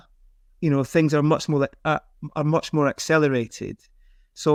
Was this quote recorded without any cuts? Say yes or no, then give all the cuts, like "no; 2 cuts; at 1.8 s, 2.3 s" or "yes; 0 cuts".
yes; 0 cuts